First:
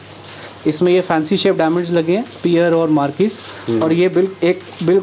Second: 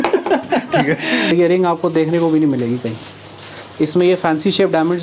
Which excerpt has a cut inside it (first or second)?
second